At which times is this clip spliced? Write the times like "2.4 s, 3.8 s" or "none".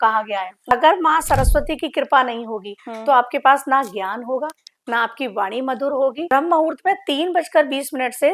0.7 s, 6.3 s